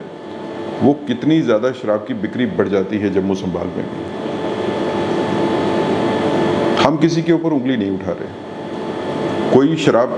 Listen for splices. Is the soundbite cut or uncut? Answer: uncut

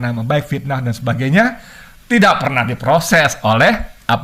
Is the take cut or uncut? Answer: uncut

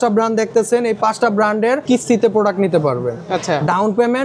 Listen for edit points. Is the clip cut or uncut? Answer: cut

